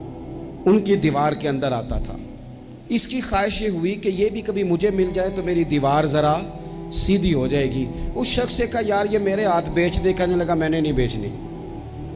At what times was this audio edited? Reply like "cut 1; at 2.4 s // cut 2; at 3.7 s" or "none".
none